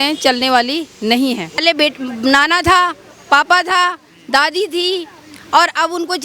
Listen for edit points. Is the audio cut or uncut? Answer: cut